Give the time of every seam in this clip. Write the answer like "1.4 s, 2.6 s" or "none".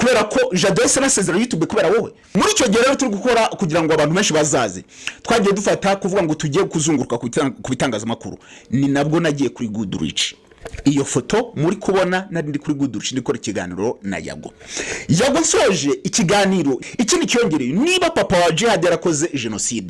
2.2 s, 16.8 s